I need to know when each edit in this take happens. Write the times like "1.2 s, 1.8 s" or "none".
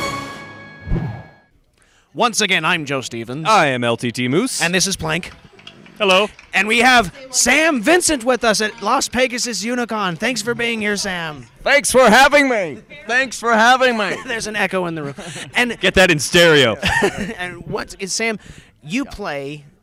none